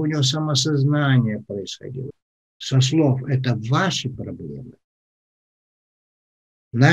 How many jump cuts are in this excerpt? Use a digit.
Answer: 1